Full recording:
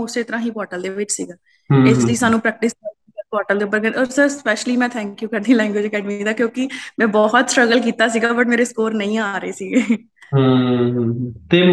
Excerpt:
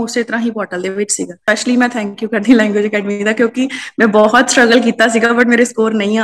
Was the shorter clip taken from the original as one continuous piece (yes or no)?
no